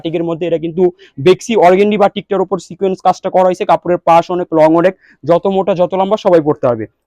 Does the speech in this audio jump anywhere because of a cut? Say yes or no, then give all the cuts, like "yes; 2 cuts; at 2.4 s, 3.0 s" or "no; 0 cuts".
no; 0 cuts